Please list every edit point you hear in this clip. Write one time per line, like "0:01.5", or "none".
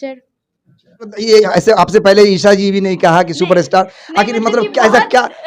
0:01.2

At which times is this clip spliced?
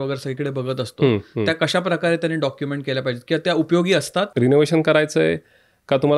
0:04.3

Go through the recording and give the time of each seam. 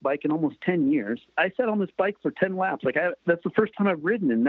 0:01.3
0:03.2

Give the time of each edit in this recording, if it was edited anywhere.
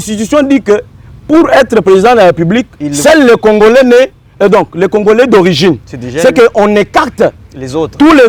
none

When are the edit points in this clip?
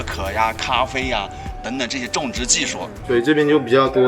0:03.1

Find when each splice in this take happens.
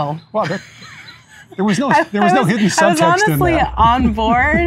none

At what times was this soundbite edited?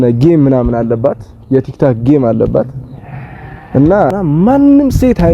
0:04.1

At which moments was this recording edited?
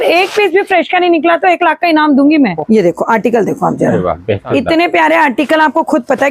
0:02.6
0:04.4

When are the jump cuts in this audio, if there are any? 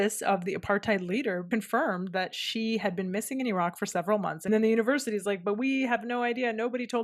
0:01.5
0:04.5

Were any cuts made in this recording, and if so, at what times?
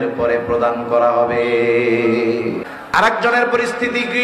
0:02.7

